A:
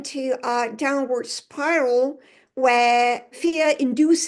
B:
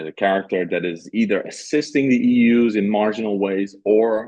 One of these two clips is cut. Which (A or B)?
A